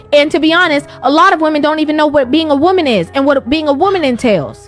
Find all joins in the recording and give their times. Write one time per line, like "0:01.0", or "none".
0:03.3